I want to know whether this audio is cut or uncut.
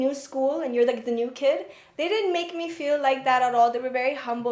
uncut